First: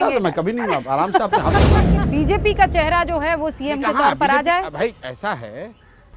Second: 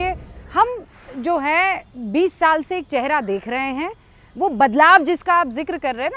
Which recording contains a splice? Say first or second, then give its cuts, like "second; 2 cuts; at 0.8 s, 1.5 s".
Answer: first; 1 cut; at 1.9 s